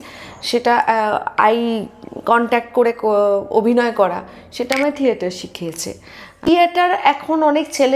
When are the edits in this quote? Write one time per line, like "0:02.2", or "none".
0:06.5